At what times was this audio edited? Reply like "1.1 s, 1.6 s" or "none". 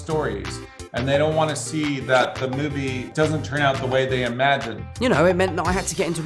3.0 s, 4.8 s